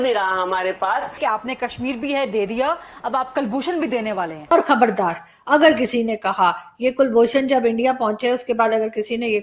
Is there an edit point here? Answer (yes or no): yes